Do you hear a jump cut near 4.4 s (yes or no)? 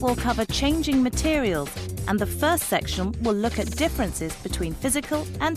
yes